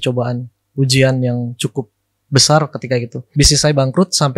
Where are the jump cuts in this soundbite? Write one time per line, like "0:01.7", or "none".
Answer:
0:03.2

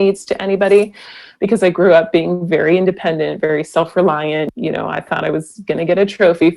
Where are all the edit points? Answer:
0:04.5

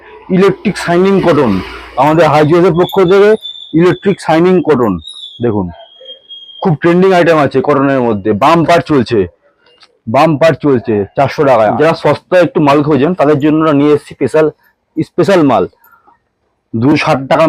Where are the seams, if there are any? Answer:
0:11.7

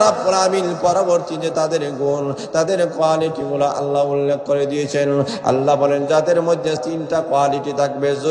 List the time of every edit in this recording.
0:06.8

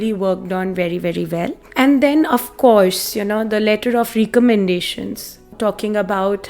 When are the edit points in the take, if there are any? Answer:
0:01.6
0:05.5

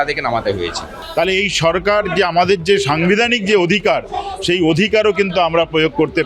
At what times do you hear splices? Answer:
0:00.9

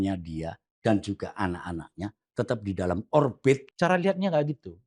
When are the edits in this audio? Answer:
0:03.7

